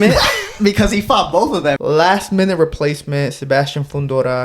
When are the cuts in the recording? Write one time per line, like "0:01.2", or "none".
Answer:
0:01.8